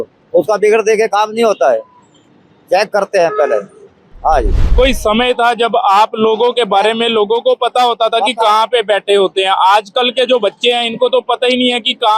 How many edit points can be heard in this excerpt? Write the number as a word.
one